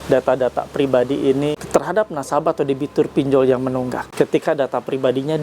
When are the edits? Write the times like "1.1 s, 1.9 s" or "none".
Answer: 1.5 s, 4.0 s